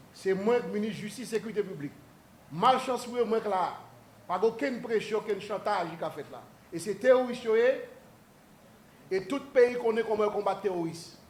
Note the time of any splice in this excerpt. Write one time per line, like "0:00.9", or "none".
none

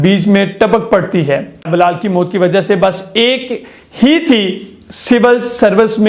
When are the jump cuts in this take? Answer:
0:01.7

